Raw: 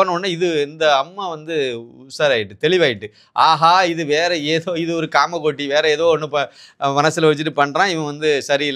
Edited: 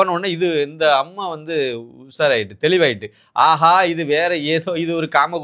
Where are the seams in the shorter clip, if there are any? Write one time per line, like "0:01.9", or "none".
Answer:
none

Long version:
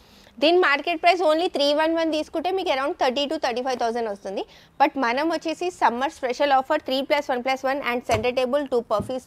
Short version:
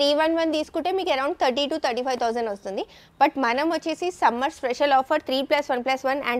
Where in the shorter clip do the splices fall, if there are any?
none

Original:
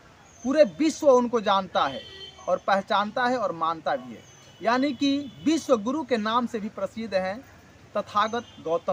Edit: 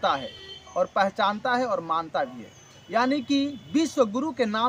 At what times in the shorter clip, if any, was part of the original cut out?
none

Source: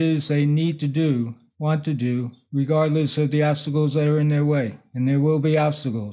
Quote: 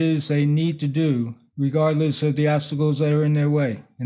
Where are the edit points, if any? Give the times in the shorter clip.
0:01.4

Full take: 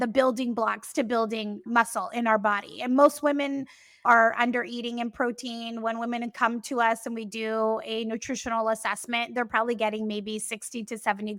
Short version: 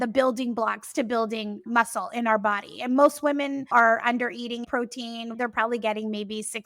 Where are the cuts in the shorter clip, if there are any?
0:03.6
0:04.8

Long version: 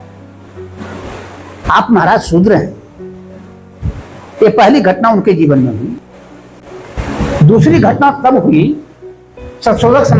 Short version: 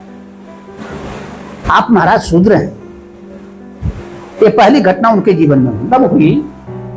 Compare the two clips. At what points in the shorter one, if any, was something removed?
0:05.9

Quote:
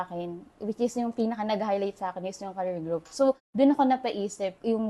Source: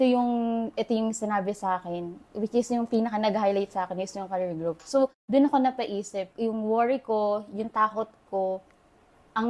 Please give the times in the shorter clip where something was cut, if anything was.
none

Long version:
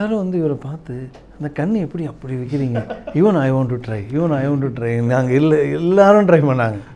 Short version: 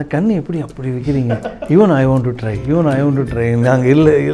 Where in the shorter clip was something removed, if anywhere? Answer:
none

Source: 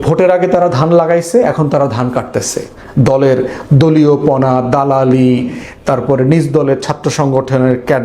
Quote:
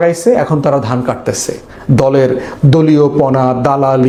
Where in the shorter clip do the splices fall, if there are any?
none

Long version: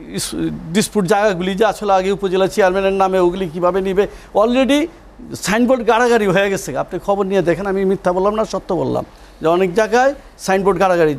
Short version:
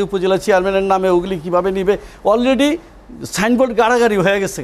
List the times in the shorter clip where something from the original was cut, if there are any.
none

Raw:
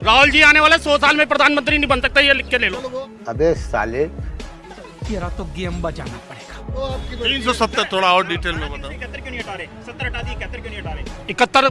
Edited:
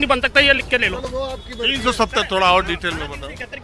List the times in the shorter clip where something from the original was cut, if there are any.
0:01.0

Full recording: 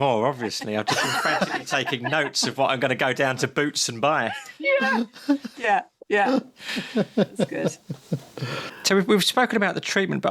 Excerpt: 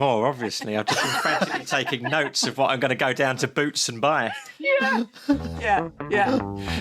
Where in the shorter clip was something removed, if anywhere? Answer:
none

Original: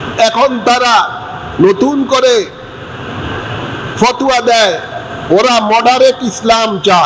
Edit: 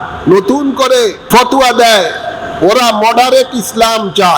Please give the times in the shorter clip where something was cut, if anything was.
0:01.2

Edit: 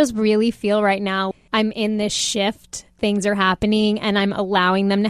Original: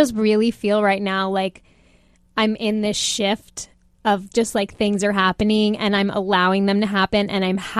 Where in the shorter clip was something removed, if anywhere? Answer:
0:01.3
0:02.9

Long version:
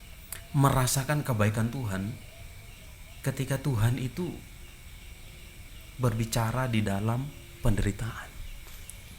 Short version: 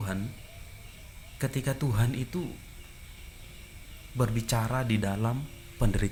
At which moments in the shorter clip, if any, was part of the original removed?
none

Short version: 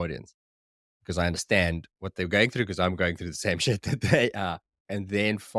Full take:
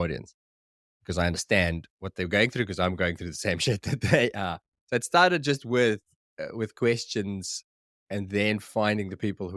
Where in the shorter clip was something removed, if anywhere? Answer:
0:04.7

